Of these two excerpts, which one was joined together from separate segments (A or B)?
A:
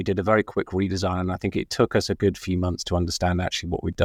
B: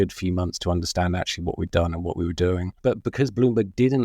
B